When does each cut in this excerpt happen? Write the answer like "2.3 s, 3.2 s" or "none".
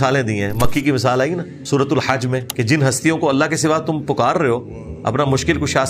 1.5 s, 2.5 s